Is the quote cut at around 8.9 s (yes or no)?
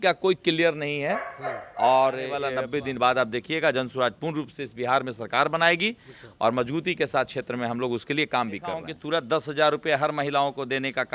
yes